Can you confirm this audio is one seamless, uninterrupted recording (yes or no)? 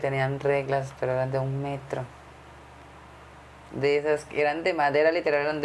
yes